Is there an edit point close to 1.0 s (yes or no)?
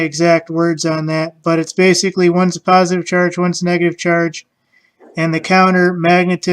yes